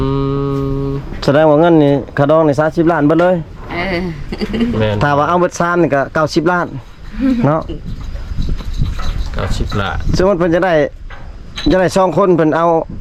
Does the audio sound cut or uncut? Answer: uncut